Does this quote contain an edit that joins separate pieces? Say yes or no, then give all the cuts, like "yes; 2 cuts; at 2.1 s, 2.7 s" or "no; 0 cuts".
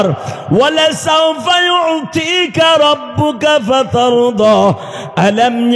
no; 0 cuts